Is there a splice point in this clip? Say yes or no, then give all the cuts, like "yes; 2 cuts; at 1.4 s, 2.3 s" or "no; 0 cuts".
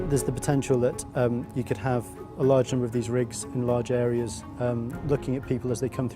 no; 0 cuts